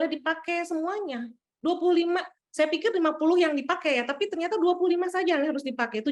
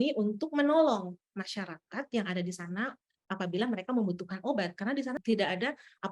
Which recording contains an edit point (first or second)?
second